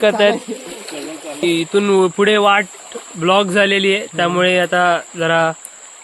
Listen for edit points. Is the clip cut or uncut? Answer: cut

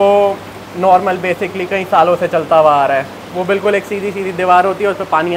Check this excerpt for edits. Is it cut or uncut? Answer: uncut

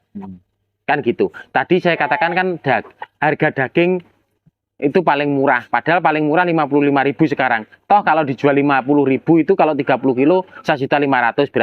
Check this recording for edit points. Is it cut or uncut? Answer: uncut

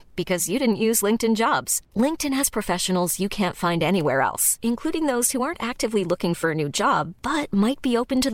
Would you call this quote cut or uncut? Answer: uncut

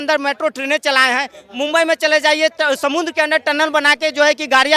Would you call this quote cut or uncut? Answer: uncut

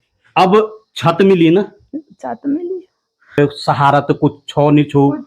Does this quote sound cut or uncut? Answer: cut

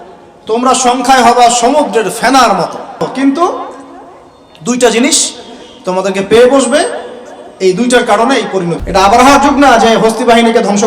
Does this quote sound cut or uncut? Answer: cut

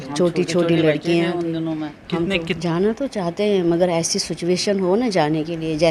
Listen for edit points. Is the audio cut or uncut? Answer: cut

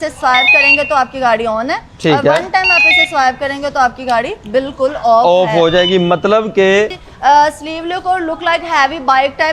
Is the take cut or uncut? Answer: cut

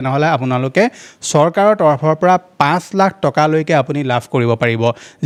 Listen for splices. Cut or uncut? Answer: uncut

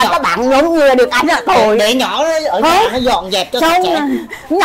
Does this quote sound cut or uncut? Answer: uncut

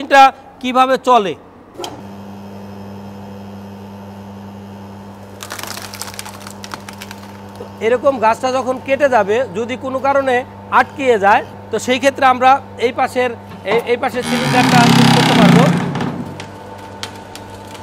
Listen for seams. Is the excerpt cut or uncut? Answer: cut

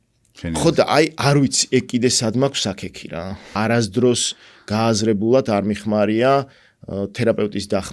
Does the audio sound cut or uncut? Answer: uncut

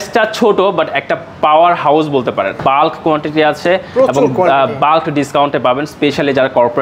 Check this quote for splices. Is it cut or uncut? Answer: cut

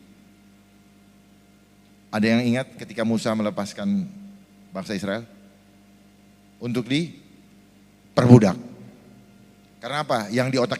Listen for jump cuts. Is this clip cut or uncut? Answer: uncut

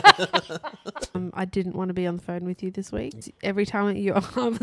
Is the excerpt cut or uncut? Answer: cut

